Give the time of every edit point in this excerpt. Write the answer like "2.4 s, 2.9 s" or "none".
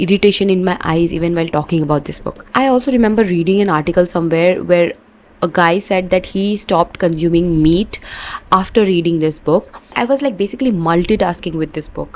2.5 s, 9.8 s